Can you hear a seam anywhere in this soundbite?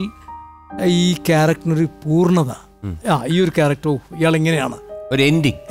no; 0 cuts

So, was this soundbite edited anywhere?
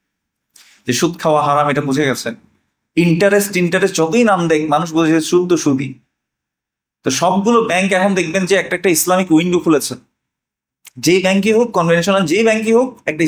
no; 0 cuts

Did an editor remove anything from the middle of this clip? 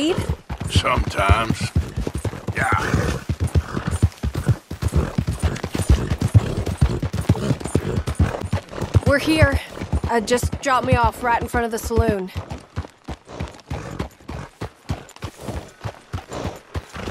yes; 1 cut; at 8.5 s

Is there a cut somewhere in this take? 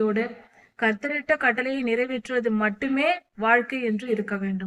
no; 0 cuts

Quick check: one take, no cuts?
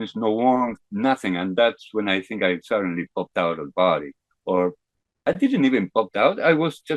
yes; 0 cuts

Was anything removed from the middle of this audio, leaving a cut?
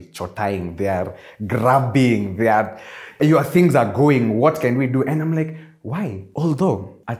yes; 2 cuts; at 3.2 s, 6.2 s

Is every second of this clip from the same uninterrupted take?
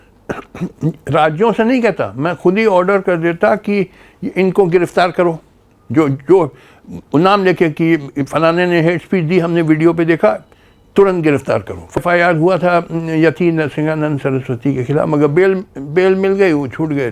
no; 1 cut; at 12.0 s

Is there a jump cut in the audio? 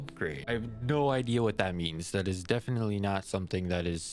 no; 0 cuts

